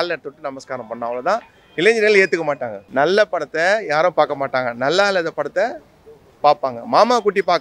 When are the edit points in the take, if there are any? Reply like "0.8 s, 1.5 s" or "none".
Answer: 2.8 s